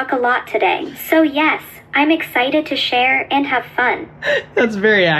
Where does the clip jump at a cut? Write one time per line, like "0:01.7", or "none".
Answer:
0:00.9
0:04.1